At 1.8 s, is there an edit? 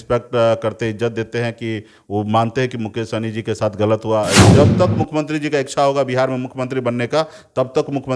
no; 1 cut; at 4.5 s

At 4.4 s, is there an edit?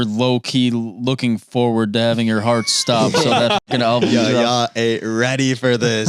no; 0 cuts

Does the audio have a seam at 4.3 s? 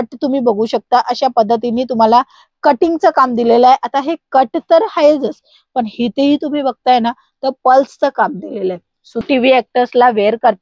no; 1 cut; at 9.1 s

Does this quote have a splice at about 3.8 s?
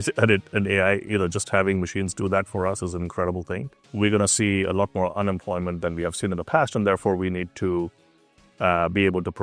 yes; 1 cut; at 3.8 s

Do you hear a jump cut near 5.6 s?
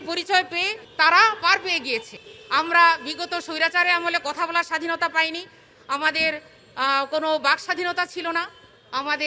no; 1 cut; at 2.2 s

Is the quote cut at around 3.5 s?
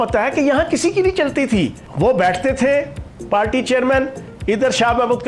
no; 1 cut; at 1.8 s

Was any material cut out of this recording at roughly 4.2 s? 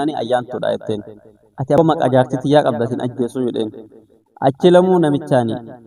no; 1 cut; at 1.8 s

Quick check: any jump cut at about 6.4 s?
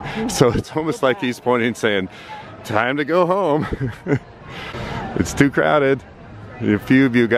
no; 1 cut; at 4.7 s

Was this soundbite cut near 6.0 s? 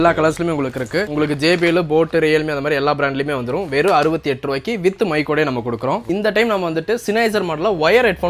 yes; 2 cuts; at 1.1 s, 6.0 s

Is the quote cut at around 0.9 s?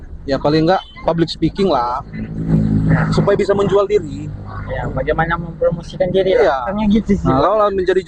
yes; 3 cuts; at 0.9 s, 2.5 s, 6.8 s

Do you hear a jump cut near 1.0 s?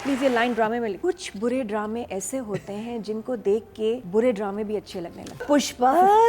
yes; 3 cuts; at 1.0 s, 4.0 s, 5.4 s

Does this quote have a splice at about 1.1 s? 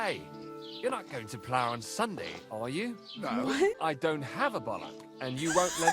no; 1 cut; at 3.8 s

